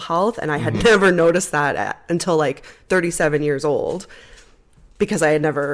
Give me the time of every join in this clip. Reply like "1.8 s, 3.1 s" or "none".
none